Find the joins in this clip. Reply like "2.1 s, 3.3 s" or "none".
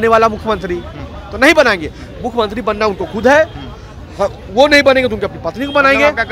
none